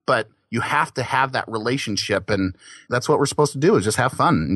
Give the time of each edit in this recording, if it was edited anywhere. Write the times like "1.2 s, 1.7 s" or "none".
none